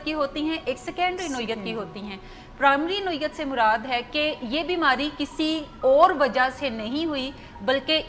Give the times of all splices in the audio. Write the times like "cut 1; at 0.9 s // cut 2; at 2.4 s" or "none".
none